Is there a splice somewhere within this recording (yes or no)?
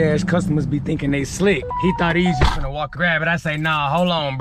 yes